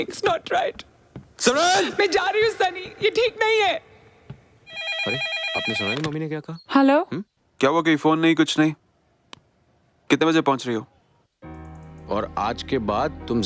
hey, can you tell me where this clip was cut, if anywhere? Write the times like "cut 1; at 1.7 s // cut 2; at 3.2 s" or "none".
cut 1; at 4.8 s